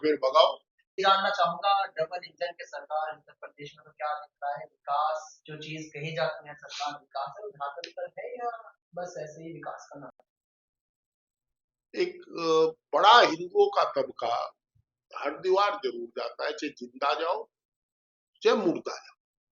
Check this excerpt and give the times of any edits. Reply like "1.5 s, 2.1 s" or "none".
0.9 s, 10.5 s